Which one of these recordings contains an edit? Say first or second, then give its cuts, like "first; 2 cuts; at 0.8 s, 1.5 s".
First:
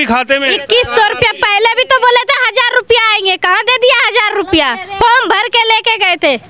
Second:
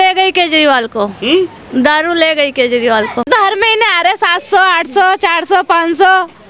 second; 1 cut; at 3.3 s